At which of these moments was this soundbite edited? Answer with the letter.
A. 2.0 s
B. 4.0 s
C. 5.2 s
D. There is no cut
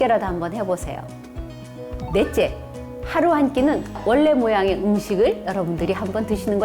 B